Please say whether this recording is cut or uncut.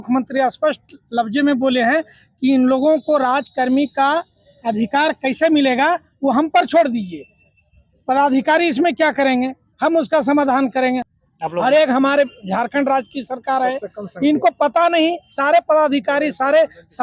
cut